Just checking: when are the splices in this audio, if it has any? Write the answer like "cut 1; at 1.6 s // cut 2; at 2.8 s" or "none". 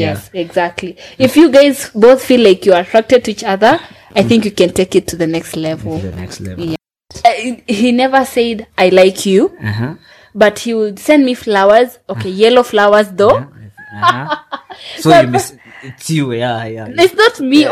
cut 1; at 7.1 s